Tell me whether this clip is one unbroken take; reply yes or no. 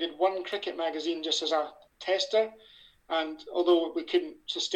no